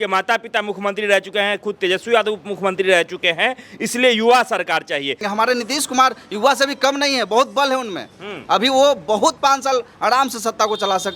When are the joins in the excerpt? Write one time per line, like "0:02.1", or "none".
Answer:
0:05.2